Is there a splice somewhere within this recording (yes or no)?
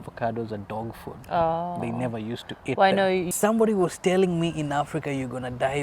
yes